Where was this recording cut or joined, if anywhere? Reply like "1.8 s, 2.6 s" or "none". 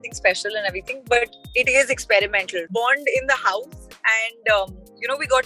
2.6 s